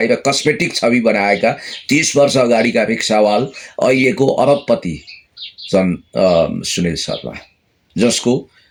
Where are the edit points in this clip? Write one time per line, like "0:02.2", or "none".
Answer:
none

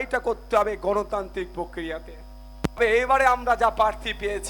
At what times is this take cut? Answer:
0:02.8

